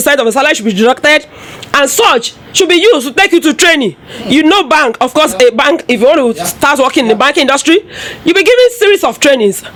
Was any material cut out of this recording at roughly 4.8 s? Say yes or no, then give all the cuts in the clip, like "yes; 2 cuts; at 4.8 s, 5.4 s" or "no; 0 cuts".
no; 0 cuts